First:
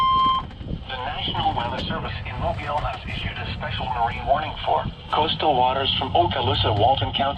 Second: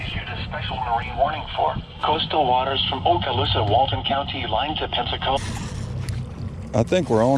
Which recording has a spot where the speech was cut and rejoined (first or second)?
second